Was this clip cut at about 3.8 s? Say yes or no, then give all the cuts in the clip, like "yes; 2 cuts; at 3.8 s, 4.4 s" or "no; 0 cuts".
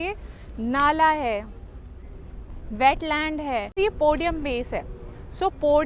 yes; 1 cut; at 3.8 s